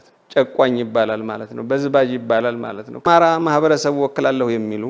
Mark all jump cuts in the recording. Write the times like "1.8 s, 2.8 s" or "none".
3.0 s